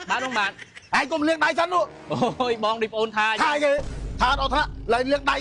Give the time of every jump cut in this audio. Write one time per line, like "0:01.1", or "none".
none

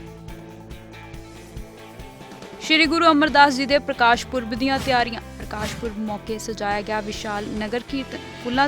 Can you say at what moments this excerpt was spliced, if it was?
0:02.3

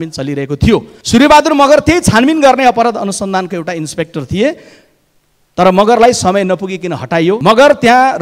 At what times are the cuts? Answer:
0:01.0
0:07.4

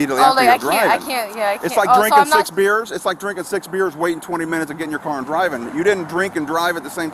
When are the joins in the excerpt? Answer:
none

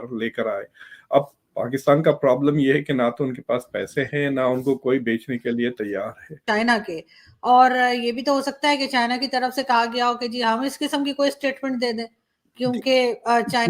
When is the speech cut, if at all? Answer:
0:06.4

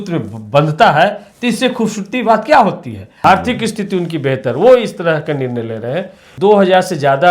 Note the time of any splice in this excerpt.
0:03.2
0:06.2

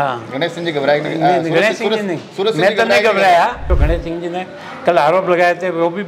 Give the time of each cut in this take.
0:03.7

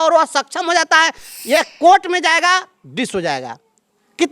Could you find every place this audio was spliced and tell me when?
0:01.3

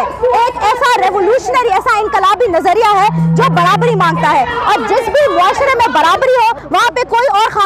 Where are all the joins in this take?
none

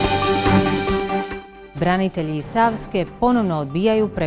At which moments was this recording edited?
none

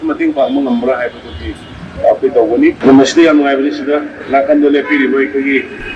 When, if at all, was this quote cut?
0:02.8

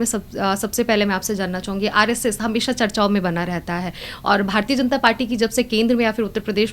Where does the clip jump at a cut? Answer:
none

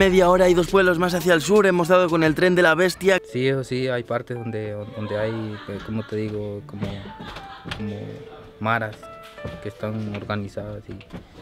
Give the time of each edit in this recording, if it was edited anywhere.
0:03.2

